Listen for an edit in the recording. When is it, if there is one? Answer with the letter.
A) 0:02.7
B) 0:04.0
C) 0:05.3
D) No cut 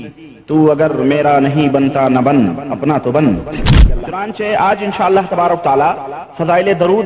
B